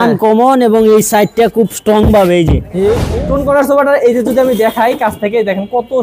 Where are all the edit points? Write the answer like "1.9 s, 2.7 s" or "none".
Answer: 3.1 s